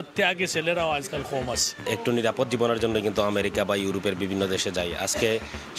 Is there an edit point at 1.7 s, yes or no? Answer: yes